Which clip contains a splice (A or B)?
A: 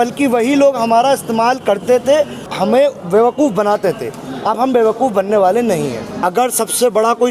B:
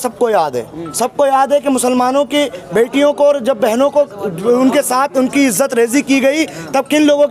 A